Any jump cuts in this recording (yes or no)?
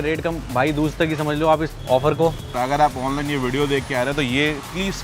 yes